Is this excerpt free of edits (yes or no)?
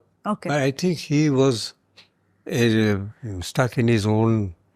yes